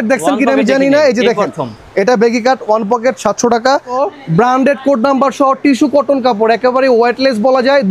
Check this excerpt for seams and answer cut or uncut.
cut